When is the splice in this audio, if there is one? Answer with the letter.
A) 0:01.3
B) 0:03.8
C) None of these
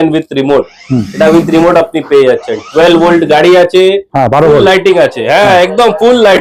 C